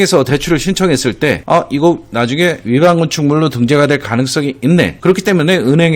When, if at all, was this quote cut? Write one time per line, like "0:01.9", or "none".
0:01.4
0:04.9